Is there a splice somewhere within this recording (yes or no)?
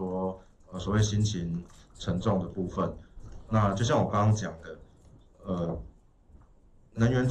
no